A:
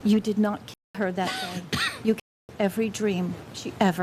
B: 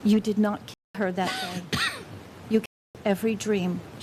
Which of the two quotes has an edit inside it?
A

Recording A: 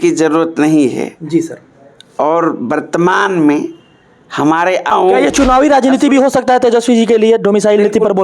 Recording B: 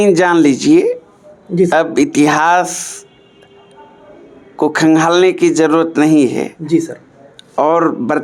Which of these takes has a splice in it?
A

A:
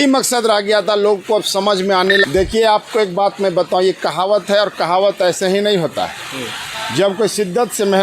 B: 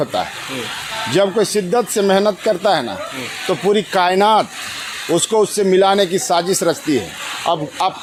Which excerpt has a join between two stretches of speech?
A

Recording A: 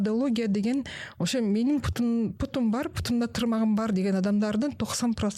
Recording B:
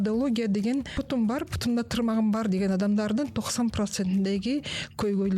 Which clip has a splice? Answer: B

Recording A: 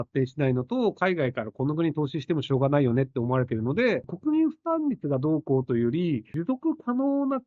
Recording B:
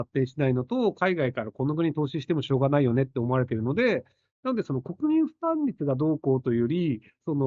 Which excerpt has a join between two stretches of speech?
A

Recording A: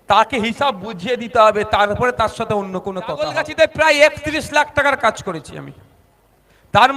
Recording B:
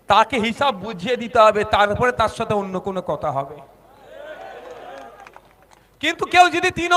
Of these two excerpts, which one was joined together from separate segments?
A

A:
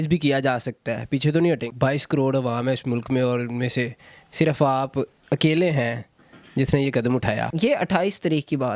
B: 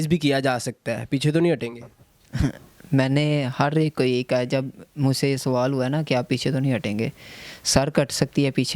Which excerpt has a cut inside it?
A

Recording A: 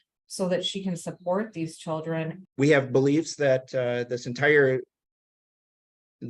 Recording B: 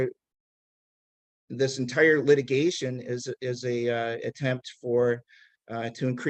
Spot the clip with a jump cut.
A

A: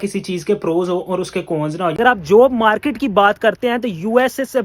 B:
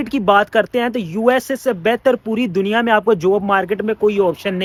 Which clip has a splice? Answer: A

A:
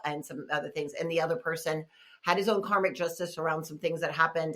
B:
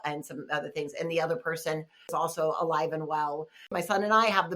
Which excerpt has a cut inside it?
B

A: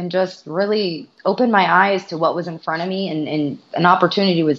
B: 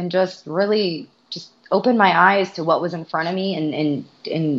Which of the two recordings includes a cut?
A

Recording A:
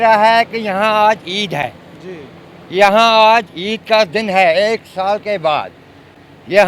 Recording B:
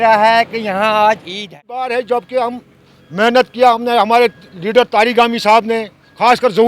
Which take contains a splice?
B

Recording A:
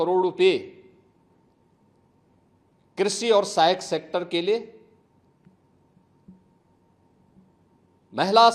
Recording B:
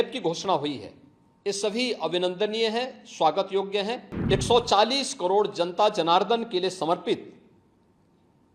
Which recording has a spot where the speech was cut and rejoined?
B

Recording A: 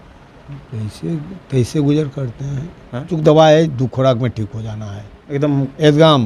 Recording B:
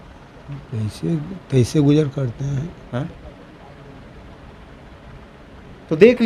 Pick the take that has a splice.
A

